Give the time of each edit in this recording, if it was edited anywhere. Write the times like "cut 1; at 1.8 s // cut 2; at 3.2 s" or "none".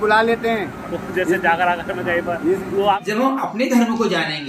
cut 1; at 2.9 s